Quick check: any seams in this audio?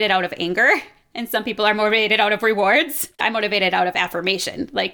yes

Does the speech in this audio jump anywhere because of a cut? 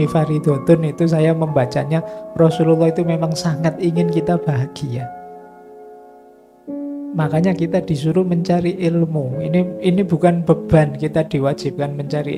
no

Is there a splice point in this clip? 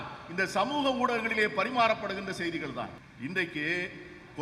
yes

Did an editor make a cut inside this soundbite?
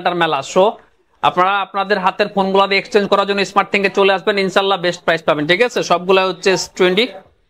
no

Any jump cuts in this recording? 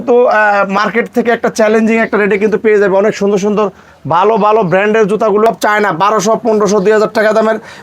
yes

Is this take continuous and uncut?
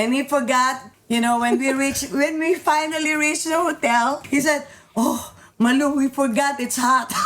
no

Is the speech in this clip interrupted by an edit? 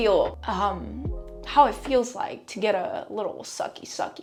no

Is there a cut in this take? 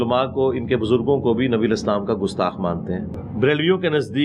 yes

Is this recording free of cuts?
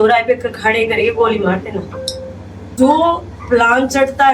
no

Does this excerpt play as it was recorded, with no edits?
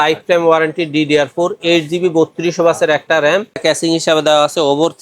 no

